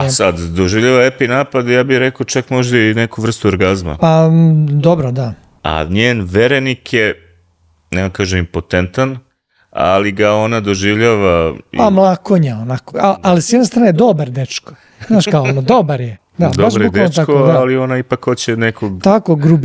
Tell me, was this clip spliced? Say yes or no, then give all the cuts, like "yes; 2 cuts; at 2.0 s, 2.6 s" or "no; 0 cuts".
yes; 3 cuts; at 5.6 s, 13.0 s, 16.2 s